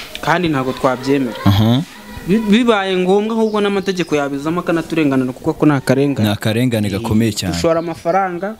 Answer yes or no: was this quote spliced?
no